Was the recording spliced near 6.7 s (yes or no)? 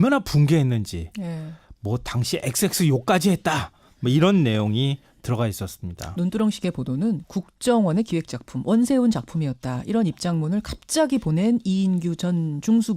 no